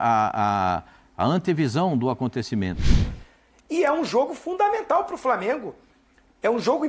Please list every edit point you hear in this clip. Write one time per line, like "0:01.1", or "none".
0:03.1